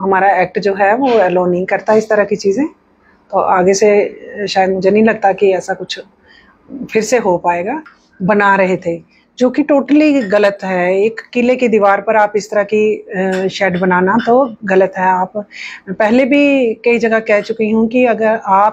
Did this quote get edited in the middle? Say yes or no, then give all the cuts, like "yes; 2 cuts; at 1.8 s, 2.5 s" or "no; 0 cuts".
yes; 1 cut; at 8.0 s